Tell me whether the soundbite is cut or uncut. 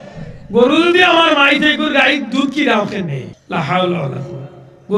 cut